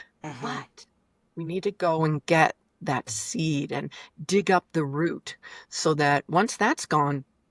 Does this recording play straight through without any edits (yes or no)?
yes